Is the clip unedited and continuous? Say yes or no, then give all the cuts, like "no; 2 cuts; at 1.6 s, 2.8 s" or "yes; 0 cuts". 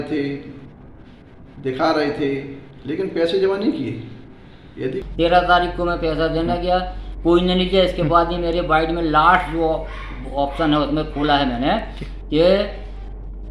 no; 1 cut; at 5.1 s